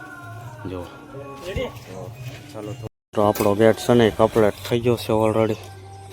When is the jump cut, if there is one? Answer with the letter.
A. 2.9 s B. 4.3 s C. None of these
A